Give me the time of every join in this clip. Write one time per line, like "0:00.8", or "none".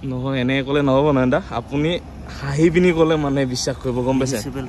none